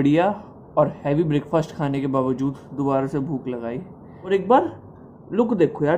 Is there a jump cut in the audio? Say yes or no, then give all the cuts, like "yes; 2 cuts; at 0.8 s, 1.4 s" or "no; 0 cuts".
yes; 1 cut; at 4.1 s